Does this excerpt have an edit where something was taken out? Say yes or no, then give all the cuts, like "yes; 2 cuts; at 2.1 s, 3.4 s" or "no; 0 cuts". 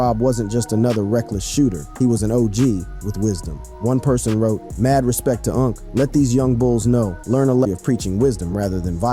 yes; 1 cut; at 7.7 s